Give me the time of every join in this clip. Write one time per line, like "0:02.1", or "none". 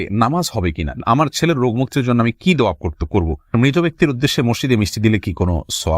0:00.9
0:03.5